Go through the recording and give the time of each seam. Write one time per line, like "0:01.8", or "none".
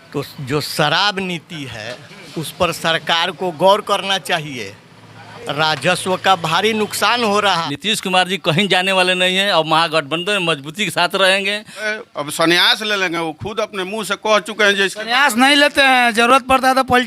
0:07.5
0:11.9